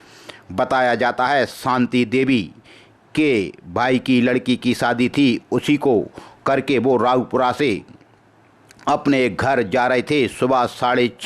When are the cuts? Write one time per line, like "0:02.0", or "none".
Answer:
none